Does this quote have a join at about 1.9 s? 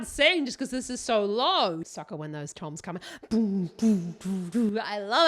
yes; 1 cut; at 1.9 s

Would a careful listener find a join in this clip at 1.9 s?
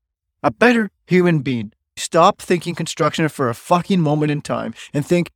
yes; 1 cut; at 1.9 s

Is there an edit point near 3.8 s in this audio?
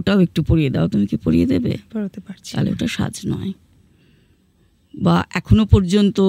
no; 0 cuts

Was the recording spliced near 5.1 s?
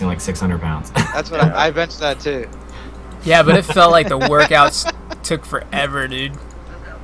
yes; 1 cut; at 5.1 s

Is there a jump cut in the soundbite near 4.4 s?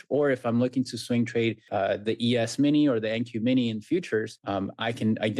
yes; 2 cuts; at 1.7 s, 4.4 s

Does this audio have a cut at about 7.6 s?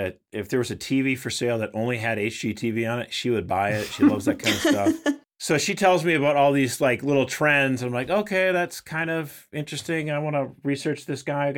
no; 1 cut; at 5.5 s

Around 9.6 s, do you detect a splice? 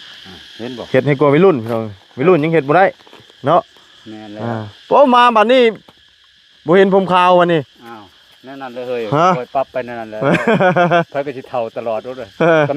no; 0 cuts

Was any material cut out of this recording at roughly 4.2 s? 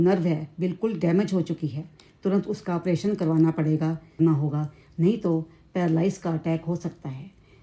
yes; 1 cut; at 4.2 s

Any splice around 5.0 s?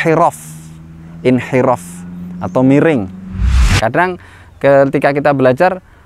no; 1 cut; at 3.6 s

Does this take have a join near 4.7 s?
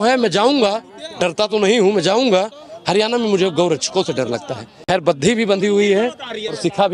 yes; 1 cut; at 4.7 s

